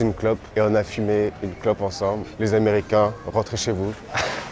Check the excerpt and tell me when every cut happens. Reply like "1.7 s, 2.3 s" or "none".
2.3 s